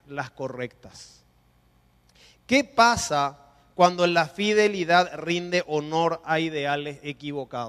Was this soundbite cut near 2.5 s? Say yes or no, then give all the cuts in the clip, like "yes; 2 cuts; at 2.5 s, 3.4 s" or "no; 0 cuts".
yes; 1 cut; at 2.5 s